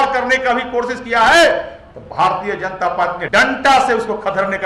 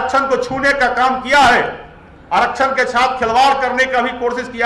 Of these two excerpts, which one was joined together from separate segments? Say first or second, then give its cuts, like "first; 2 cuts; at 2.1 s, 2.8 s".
first; 1 cut; at 3.2 s